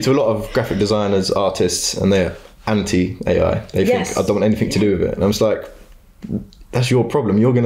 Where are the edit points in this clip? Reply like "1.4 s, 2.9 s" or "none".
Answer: none